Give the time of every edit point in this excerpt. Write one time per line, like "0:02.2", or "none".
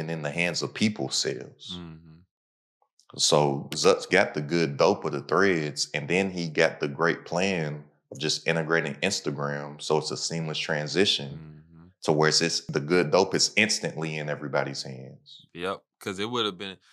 none